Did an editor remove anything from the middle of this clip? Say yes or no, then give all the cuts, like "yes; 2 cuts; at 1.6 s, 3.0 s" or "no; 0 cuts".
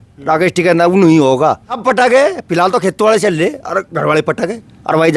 yes; 1 cut; at 1.7 s